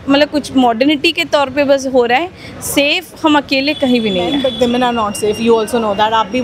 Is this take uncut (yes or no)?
no